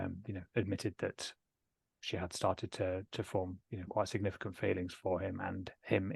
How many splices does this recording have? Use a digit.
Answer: 0